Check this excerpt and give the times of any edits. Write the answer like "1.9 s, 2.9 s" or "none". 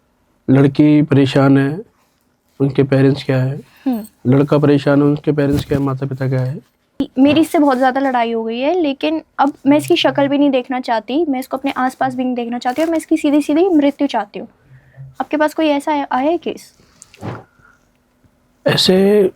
7.0 s